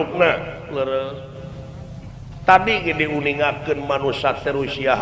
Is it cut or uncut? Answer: uncut